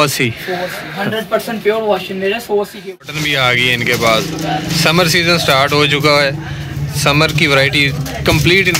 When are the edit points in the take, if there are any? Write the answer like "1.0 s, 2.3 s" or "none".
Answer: 3.2 s